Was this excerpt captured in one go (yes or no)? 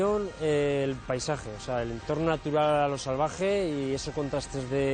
yes